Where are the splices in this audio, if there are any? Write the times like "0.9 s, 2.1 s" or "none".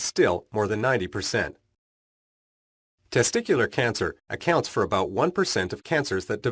none